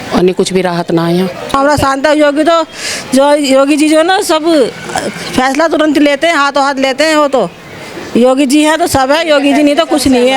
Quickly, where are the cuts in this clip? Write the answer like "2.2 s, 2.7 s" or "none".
1.5 s